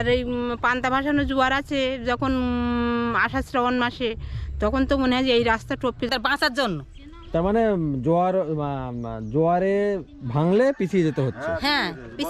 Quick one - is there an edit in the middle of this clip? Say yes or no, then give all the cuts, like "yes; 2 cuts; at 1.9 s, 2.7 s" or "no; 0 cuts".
yes; 1 cut; at 6.1 s